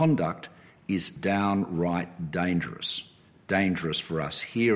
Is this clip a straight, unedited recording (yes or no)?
no